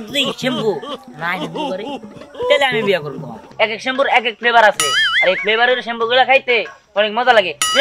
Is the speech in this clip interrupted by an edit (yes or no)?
yes